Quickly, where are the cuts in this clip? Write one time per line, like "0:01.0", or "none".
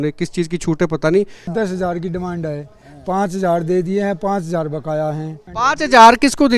0:01.5
0:05.4